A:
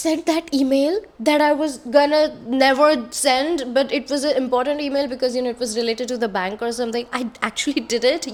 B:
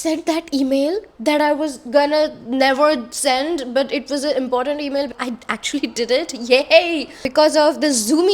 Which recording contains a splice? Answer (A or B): B